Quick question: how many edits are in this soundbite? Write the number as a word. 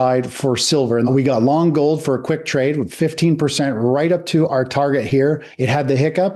two